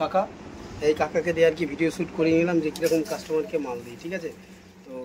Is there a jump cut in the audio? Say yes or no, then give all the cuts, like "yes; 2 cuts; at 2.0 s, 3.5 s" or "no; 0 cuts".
no; 0 cuts